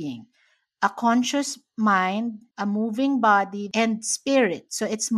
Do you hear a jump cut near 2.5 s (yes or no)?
yes